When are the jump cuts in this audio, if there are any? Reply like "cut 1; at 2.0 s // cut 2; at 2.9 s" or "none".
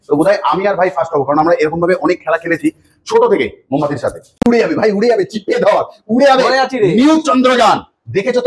cut 1; at 4.2 s